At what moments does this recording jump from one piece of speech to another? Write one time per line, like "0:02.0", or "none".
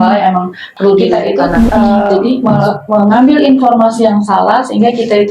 0:02.5